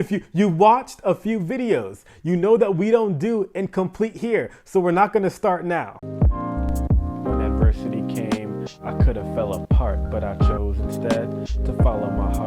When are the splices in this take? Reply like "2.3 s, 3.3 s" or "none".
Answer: 6.5 s